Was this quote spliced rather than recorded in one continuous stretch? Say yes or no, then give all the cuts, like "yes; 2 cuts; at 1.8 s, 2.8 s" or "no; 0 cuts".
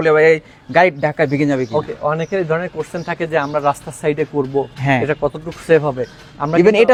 no; 0 cuts